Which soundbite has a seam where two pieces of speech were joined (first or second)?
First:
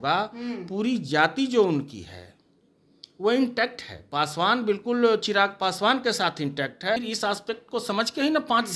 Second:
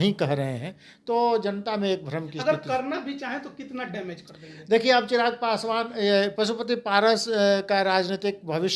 first